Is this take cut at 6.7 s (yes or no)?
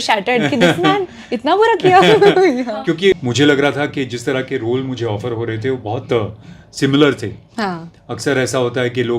no